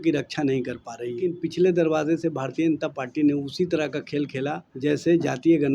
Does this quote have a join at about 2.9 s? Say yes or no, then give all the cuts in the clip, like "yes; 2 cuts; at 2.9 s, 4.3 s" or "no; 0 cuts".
no; 2 cuts; at 1.3 s, 4.7 s